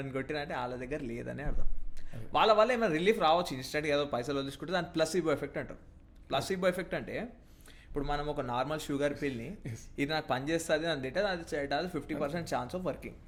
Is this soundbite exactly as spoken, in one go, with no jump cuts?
yes; 0 cuts

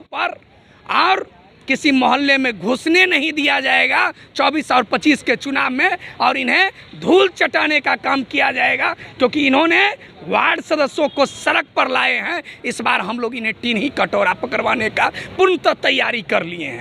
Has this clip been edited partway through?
no; 0 cuts

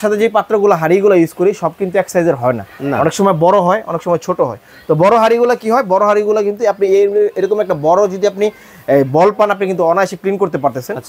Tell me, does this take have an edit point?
no; 0 cuts

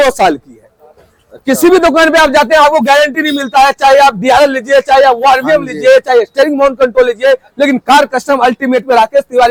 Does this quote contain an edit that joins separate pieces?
no; 0 cuts

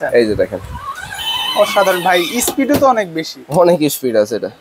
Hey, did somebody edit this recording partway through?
no; 0 cuts

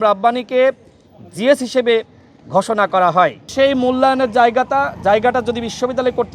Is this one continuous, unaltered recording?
no; 1 cut; at 3.4 s

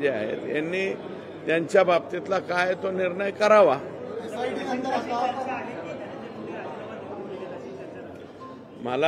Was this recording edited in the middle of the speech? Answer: no; 0 cuts

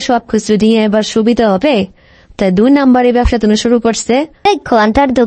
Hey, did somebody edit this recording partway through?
yes; 1 cut; at 4.4 s

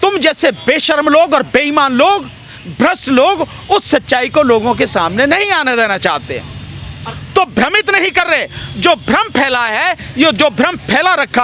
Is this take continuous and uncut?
yes; 0 cuts

